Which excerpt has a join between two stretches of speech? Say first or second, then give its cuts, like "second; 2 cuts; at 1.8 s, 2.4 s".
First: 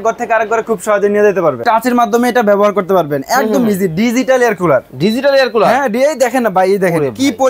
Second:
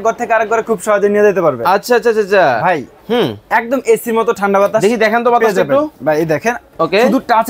first; 1 cut; at 1.6 s